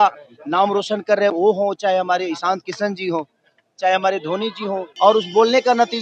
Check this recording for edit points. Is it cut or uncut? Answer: cut